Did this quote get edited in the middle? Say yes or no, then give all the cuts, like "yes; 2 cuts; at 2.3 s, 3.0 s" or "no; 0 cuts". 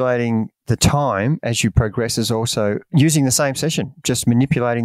no; 0 cuts